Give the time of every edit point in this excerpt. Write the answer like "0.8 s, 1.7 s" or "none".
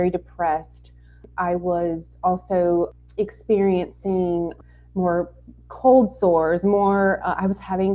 1.3 s, 3.0 s, 4.6 s